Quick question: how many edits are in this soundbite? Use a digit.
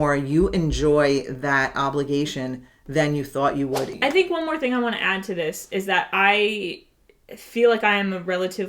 1